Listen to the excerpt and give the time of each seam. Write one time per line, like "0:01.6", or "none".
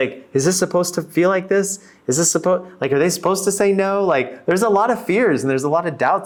none